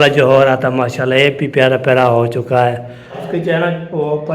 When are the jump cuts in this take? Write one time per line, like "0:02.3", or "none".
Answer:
0:03.2